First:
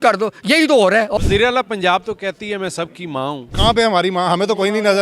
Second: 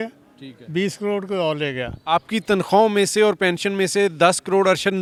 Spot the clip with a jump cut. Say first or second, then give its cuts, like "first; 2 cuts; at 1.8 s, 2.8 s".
first; 2 cuts; at 1.2 s, 3.5 s